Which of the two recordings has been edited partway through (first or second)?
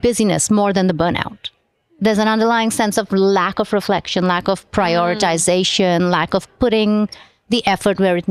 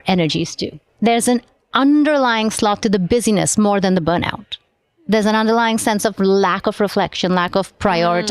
second